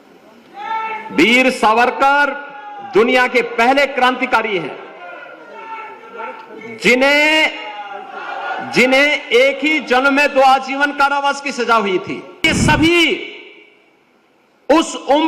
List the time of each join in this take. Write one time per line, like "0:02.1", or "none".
0:12.5